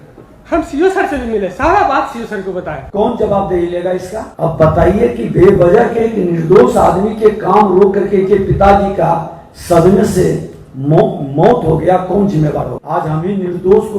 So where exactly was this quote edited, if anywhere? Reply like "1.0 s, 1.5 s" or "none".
2.8 s, 4.2 s, 12.8 s